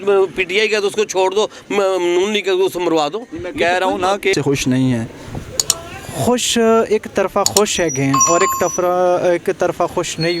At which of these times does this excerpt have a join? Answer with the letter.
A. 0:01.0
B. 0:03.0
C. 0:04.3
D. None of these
C